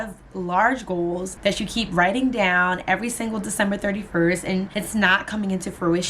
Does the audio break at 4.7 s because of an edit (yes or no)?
yes